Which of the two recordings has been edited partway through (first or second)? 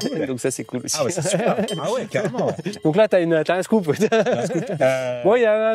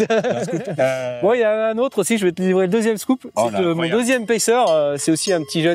first